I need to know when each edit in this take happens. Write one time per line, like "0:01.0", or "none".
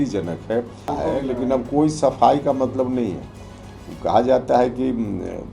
0:00.9